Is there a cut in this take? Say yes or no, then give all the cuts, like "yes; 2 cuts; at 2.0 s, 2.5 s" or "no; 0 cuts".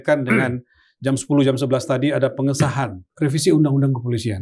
yes; 1 cut; at 3.0 s